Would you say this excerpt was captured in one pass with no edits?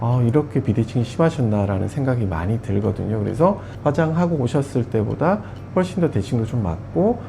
no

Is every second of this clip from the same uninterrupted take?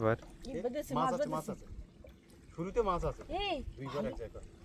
yes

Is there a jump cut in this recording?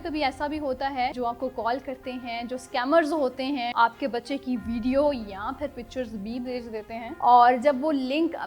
yes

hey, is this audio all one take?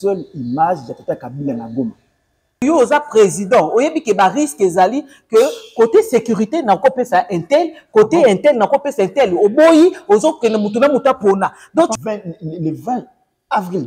no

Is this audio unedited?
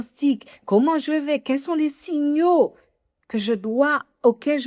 yes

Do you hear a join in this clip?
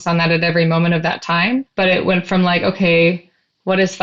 yes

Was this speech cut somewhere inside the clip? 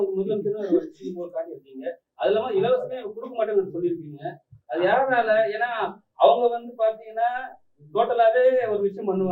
no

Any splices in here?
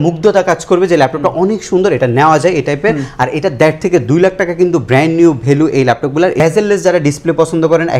yes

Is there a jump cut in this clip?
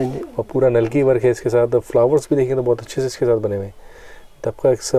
no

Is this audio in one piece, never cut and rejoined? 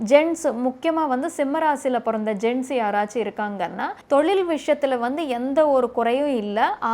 no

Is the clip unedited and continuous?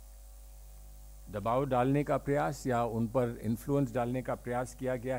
yes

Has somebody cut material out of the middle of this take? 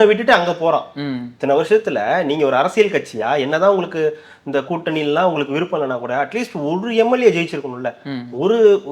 no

